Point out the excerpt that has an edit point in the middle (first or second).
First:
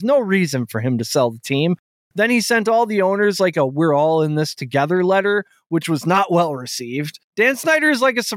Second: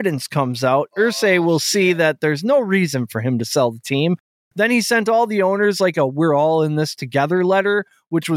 first